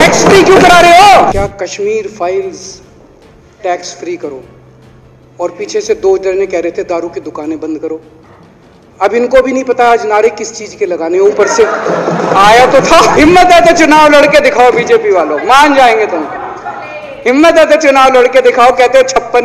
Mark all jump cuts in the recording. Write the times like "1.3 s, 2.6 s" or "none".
1.3 s, 13.1 s